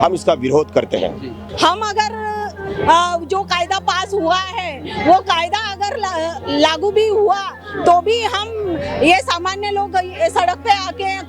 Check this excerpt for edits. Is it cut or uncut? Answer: cut